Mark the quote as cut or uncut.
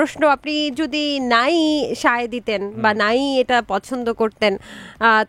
uncut